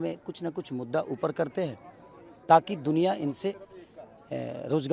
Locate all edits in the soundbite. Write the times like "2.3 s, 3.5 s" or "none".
none